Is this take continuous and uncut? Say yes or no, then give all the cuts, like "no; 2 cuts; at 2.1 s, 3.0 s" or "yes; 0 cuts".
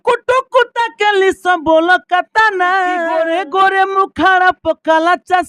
no; 1 cut; at 3.1 s